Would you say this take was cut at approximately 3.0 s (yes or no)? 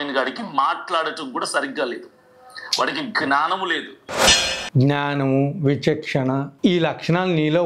no